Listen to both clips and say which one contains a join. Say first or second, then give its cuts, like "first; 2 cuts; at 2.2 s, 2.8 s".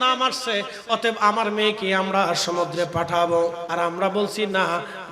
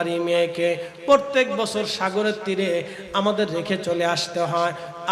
first; 1 cut; at 3.6 s